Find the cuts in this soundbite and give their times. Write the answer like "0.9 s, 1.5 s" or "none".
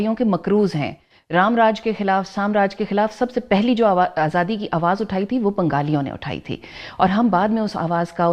none

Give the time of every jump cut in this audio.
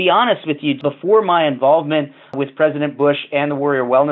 0.8 s, 2.4 s

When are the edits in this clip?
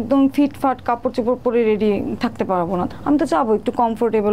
2.9 s

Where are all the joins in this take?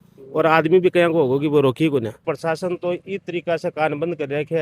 2.3 s

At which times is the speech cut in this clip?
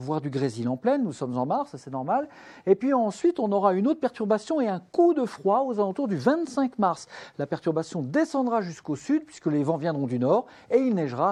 none

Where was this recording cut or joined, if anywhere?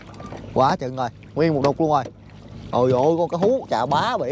2.5 s

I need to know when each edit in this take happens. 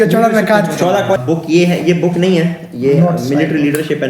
1.2 s

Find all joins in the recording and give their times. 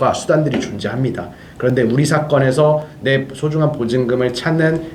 none

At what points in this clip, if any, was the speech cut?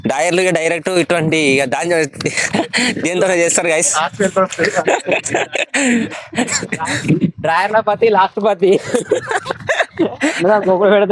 none

